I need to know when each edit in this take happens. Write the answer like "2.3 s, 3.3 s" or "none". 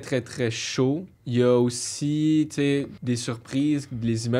1.1 s, 2.9 s